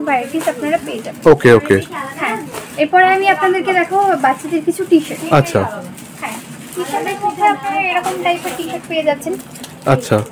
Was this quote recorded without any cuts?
yes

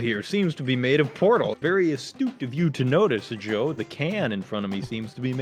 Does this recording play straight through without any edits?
no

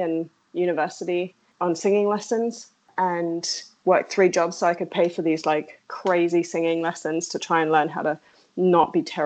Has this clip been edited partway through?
yes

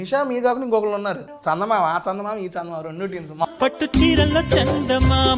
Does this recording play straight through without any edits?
no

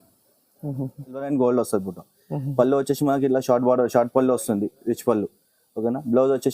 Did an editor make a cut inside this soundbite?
yes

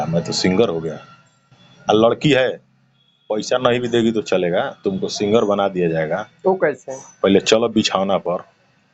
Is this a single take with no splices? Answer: yes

